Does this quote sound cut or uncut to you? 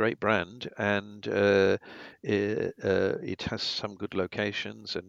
uncut